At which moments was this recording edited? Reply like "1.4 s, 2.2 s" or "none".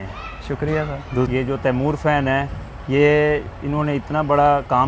1.3 s